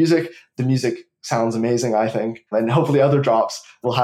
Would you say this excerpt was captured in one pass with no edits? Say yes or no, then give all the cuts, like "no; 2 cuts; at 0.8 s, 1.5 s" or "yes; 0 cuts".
no; 1 cut; at 2.4 s